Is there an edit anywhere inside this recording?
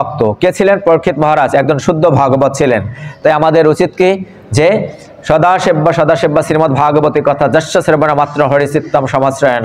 no; 0 cuts

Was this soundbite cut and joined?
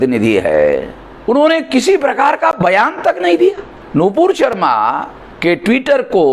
yes; 1 cut; at 3.7 s

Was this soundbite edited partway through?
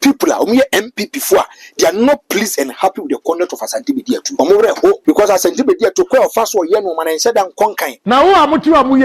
yes; 3 cuts; at 4.3 s, 5.0 s, 7.9 s

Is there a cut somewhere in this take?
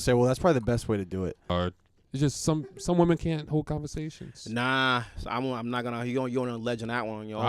yes; 1 cut; at 1.5 s

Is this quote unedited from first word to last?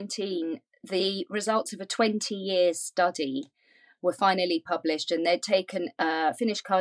yes; 0 cuts

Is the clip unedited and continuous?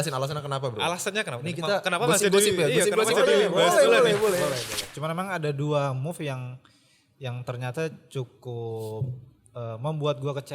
no; 1 cut; at 4.8 s

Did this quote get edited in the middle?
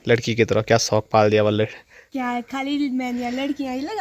no; 0 cuts

